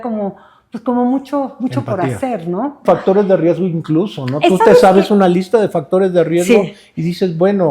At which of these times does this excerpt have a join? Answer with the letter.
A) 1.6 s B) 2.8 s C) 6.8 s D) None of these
B